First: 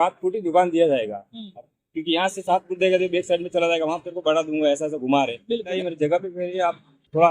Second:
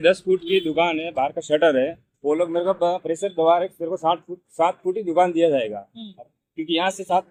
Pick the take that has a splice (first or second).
first